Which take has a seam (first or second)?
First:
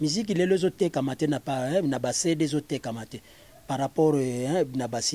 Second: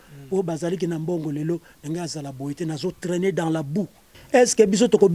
second